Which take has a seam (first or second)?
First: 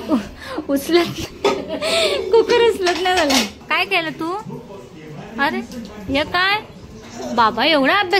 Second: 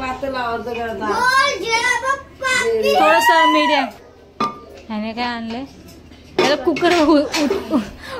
first